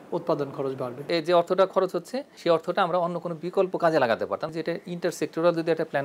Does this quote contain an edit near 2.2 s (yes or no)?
yes